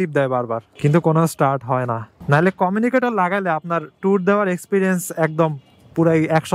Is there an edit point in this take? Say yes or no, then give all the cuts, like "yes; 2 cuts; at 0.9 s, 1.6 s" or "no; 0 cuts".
yes; 1 cut; at 2.1 s